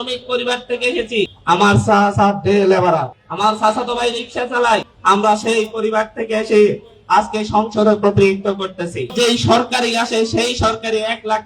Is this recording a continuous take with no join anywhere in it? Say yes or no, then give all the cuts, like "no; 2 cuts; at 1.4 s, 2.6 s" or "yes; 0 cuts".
no; 4 cuts; at 1.4 s, 3.2 s, 4.9 s, 9.1 s